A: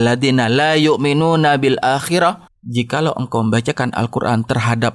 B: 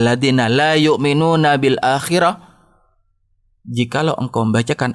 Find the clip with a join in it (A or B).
A